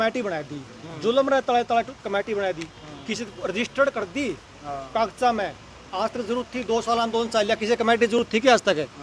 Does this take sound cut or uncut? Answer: uncut